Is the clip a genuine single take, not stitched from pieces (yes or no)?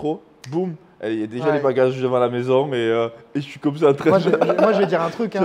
yes